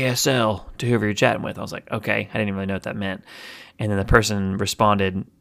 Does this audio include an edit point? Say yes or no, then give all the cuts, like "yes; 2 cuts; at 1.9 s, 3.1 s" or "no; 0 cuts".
no; 0 cuts